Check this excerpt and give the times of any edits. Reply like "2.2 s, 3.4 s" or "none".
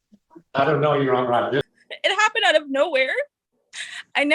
1.6 s